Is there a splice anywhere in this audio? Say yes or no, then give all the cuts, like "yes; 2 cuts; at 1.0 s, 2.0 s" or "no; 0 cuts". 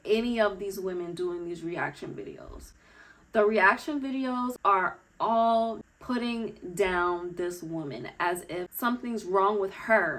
yes; 3 cuts; at 4.5 s, 5.9 s, 8.7 s